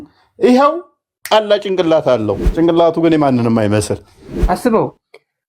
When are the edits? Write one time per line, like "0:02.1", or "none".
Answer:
0:02.4
0:04.3